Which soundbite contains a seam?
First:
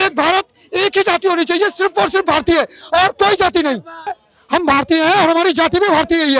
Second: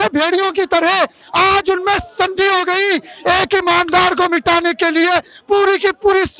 first; 1 cut; at 4.3 s

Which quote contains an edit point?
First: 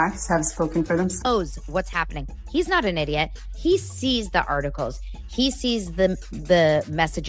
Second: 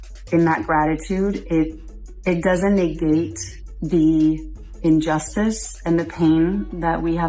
first; 1 cut; at 1.2 s

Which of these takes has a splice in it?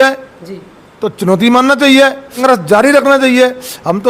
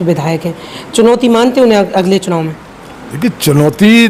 first; 1 cut; at 2.4 s

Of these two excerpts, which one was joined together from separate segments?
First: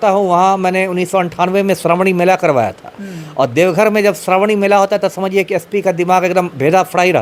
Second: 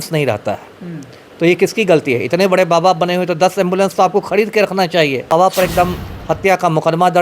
second; 1 cut; at 5.3 s

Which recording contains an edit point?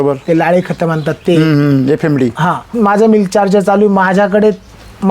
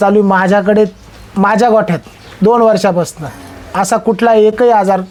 first; 1 cut; at 2.7 s

